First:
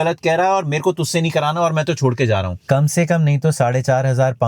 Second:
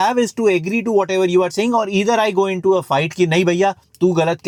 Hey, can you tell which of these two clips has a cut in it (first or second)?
first